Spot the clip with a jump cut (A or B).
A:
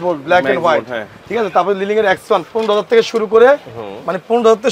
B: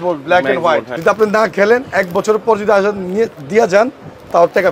B